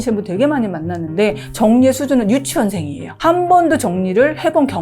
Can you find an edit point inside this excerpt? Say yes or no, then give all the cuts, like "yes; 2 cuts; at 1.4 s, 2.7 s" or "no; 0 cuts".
no; 0 cuts